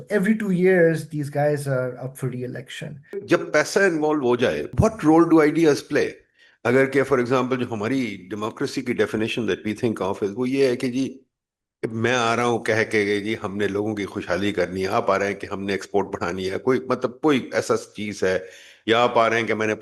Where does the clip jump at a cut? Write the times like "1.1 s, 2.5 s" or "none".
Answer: 3.2 s, 4.7 s